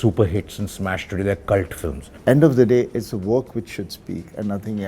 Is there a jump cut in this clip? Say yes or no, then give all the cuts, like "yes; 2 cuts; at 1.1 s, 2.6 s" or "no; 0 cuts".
yes; 1 cut; at 2.1 s